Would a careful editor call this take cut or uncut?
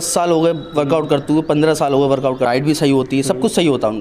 cut